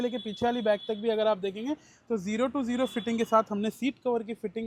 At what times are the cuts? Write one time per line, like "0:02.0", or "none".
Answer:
none